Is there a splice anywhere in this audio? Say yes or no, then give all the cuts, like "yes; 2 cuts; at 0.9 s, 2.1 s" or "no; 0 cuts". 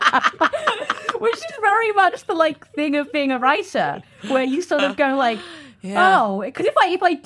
no; 0 cuts